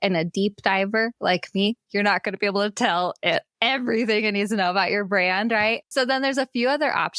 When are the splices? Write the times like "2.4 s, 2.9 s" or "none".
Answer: 5.9 s